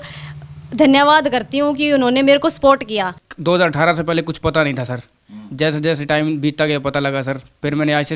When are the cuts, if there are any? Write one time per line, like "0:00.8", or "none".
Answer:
0:03.2